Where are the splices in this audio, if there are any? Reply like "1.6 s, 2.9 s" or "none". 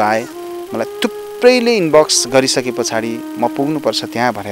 none